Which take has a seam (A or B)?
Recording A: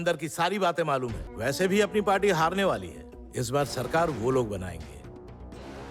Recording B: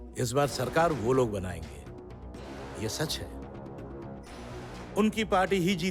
A